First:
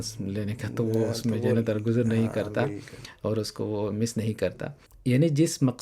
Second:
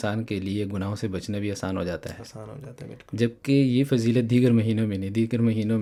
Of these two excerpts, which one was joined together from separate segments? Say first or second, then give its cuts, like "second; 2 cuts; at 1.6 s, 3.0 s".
first; 1 cut; at 4.8 s